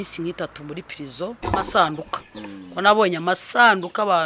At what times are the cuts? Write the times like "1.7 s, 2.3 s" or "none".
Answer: 1.4 s